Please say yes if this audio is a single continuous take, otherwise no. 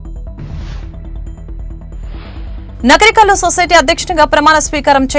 no